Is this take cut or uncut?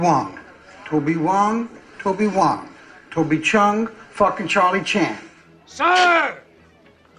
cut